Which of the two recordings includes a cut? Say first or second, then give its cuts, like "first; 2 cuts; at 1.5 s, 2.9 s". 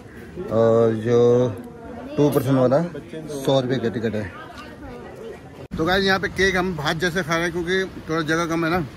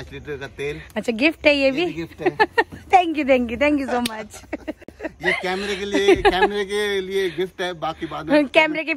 first; 1 cut; at 5.7 s